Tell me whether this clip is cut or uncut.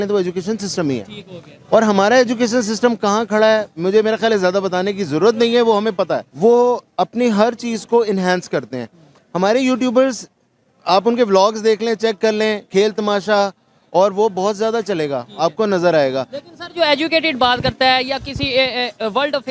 uncut